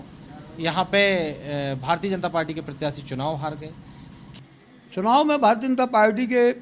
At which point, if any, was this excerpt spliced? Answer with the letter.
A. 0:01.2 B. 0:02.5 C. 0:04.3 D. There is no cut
C